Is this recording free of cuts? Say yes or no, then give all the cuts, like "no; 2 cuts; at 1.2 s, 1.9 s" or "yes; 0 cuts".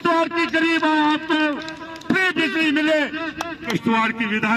no; 1 cut; at 3.6 s